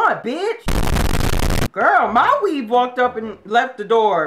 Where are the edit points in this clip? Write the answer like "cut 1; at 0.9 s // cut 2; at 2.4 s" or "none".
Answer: cut 1; at 1.6 s